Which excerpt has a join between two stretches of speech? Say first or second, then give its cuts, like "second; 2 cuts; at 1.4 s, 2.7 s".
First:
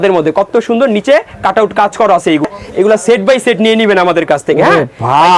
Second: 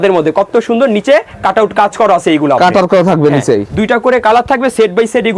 first; 1 cut; at 2.5 s